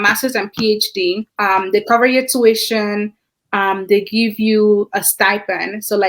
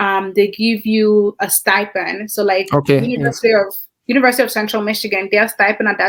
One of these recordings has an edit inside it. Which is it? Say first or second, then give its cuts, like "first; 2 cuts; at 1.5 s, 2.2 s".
first; 1 cut; at 1.3 s